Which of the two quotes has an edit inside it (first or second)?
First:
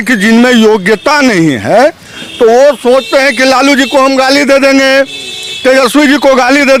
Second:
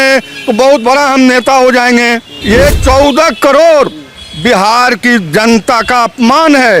second